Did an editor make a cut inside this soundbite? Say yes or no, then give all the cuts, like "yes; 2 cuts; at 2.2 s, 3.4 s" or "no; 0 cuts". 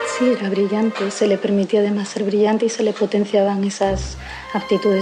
yes; 1 cut; at 1.1 s